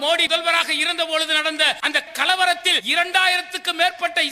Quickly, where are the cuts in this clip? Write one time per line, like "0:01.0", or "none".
0:02.8